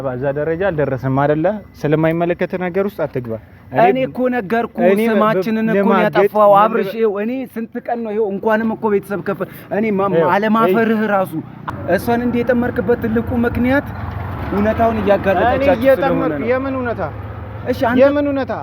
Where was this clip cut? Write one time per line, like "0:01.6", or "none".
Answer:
0:11.6